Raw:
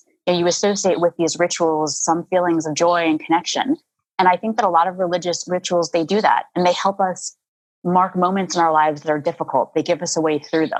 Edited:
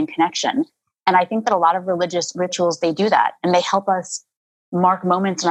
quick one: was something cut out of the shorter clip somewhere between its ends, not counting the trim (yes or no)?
no